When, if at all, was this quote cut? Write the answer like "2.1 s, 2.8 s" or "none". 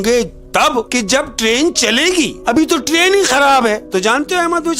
0.9 s, 2.4 s, 3.8 s